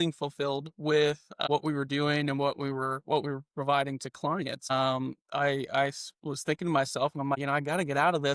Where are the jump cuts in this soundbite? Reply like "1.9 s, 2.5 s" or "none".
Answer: 1.4 s, 4.7 s, 7.4 s